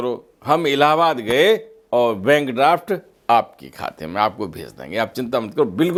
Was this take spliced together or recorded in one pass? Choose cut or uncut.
uncut